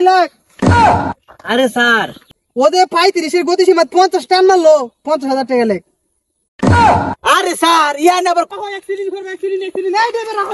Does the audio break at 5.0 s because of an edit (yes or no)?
no